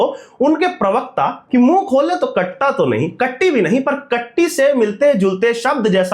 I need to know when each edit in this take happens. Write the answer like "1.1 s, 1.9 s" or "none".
1.4 s